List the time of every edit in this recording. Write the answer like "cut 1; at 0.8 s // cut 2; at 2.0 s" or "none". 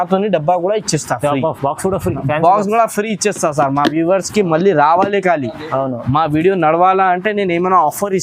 none

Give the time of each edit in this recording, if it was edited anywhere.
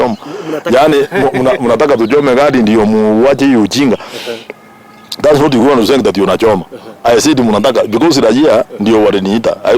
none

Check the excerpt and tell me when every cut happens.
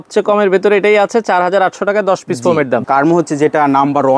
cut 1; at 2.8 s

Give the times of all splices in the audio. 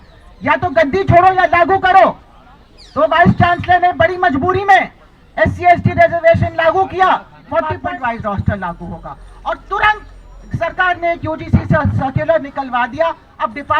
cut 1; at 7.7 s

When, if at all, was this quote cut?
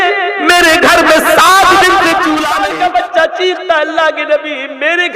cut 1; at 2.5 s

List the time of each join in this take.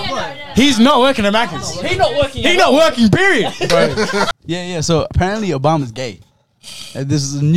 cut 1; at 4.4 s

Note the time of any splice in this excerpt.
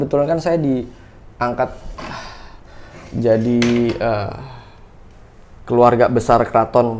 none

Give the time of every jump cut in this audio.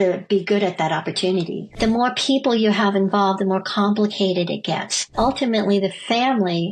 cut 1; at 1.8 s // cut 2; at 5.1 s

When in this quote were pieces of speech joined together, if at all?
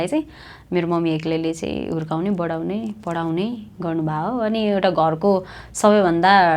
none

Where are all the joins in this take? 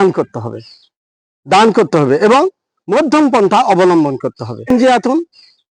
cut 1; at 4.7 s

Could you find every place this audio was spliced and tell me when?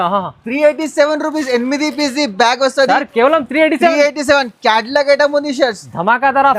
none

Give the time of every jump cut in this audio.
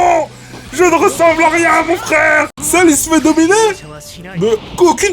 cut 1; at 2.6 s

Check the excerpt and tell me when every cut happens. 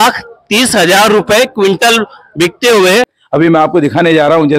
cut 1; at 3.2 s

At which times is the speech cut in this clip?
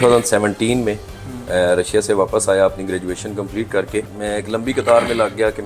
cut 1; at 4.1 s

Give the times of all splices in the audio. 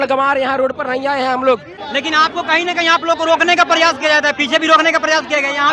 cut 1; at 1.8 s

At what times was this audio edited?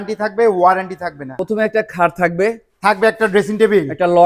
cut 1; at 1.3 s

